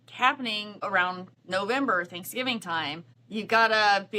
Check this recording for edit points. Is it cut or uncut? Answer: cut